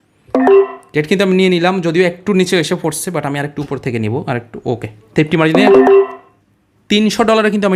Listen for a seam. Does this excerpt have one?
no; 0 cuts

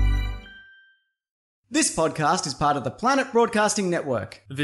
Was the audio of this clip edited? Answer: yes; 1 cut; at 1.6 s

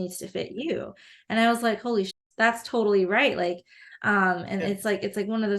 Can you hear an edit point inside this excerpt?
yes; 1 cut; at 2.1 s

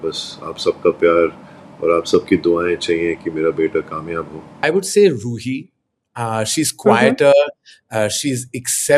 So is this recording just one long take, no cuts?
no; 1 cut; at 4.6 s

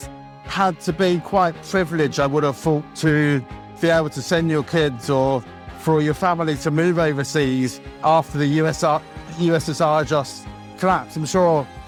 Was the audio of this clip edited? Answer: no; 0 cuts

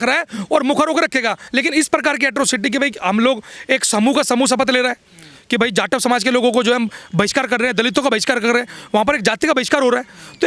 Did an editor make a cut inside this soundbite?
yes; 1 cut; at 1.4 s

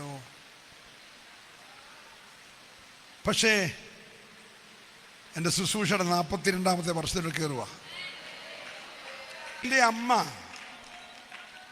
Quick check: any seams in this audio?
yes; 1 cut; at 9.6 s

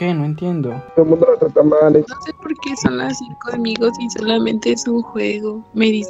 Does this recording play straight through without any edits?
no; 2 cuts; at 0.8 s, 2.1 s

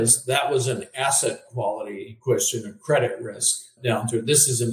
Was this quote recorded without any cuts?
no; 2 cuts; at 2.1 s, 3.8 s

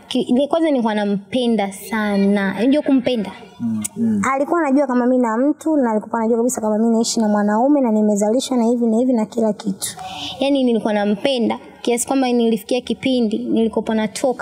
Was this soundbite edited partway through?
yes; 2 cuts; at 3.9 s, 9.9 s

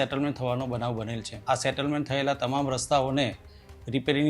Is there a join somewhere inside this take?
yes; 1 cut; at 1.3 s

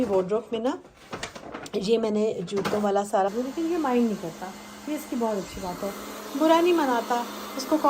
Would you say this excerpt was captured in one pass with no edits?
no; 1 cut; at 3.3 s

